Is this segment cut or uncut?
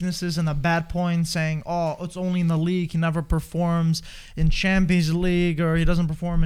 uncut